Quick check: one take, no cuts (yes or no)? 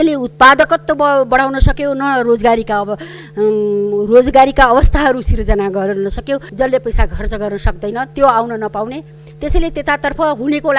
no